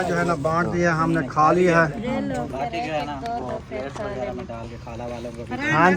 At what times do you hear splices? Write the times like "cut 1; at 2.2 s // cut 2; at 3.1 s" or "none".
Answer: none